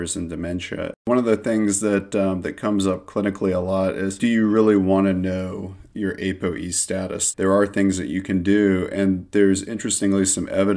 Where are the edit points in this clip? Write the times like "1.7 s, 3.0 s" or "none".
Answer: 1.0 s, 7.3 s